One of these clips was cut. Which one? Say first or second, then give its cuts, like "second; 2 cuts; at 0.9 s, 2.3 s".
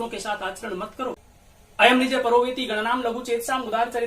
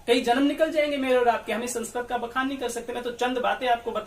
first; 1 cut; at 1.2 s